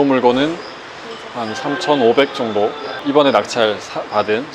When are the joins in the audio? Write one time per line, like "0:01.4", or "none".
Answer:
0:02.9